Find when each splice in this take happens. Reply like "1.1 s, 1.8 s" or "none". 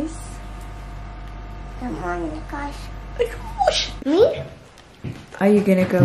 3.9 s